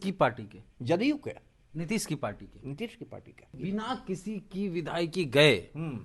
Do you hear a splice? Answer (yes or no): yes